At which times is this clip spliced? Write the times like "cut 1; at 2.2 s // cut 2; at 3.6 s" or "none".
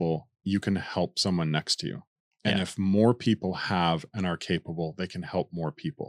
none